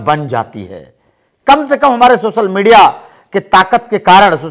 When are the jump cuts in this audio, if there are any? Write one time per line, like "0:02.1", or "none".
none